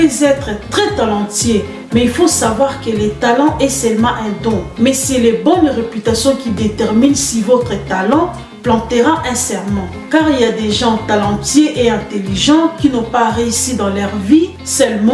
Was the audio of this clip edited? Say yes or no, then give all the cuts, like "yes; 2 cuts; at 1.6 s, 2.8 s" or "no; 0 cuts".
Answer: no; 0 cuts